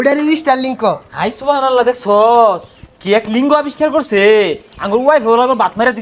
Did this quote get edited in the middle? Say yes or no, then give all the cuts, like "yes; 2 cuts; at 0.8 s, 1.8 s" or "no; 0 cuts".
no; 0 cuts